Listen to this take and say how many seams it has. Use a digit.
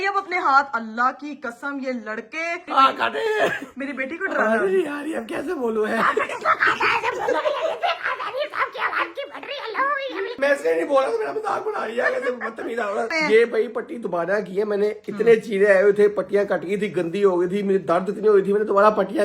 3